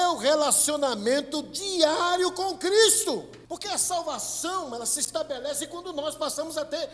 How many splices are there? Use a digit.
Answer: 1